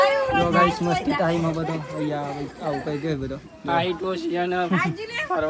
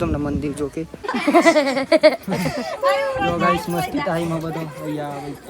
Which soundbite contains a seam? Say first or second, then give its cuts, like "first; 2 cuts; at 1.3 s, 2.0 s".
second; 1 cut; at 1.0 s